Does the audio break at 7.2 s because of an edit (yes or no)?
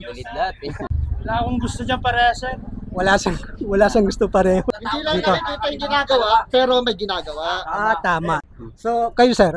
no